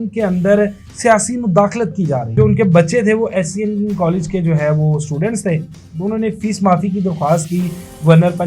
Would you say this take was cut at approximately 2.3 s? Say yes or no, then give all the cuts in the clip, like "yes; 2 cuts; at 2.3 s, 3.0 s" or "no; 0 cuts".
yes; 1 cut; at 2.3 s